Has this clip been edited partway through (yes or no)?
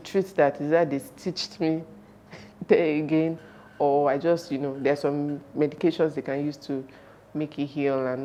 no